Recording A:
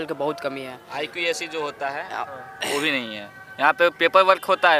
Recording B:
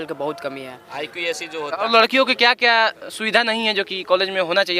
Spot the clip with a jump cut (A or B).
B